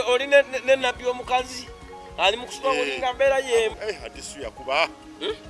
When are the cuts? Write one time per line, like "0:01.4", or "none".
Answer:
0:03.8